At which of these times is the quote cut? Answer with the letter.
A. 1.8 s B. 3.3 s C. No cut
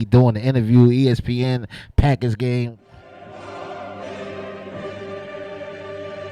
B